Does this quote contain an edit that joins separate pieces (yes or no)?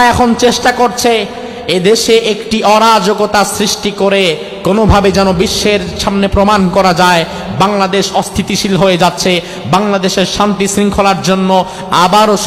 no